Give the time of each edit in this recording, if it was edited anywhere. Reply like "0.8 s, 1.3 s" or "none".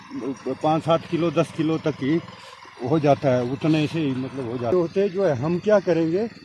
4.7 s